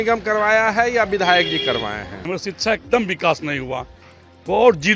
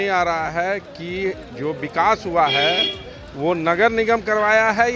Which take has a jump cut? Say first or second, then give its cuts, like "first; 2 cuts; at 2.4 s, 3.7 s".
first; 1 cut; at 2.3 s